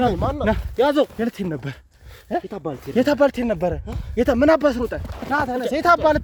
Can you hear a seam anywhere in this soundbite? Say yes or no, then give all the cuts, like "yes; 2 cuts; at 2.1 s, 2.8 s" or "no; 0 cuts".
no; 0 cuts